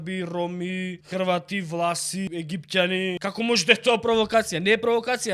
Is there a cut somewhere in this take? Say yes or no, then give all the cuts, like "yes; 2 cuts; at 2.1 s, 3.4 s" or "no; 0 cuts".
yes; 3 cuts; at 1.0 s, 2.3 s, 3.2 s